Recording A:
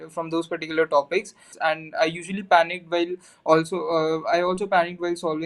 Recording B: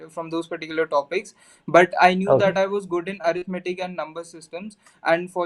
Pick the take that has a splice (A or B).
A